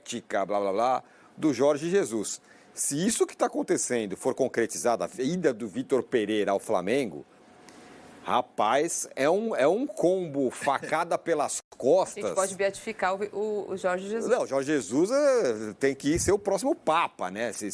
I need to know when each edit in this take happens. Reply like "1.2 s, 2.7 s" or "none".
none